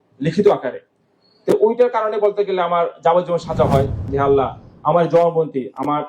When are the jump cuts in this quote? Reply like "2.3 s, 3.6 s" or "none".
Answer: 4.0 s